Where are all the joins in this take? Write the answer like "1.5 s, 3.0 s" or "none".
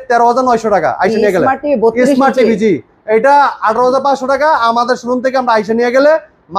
none